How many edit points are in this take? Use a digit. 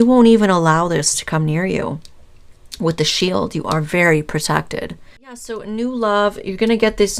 1